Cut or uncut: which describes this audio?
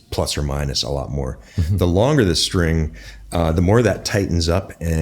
uncut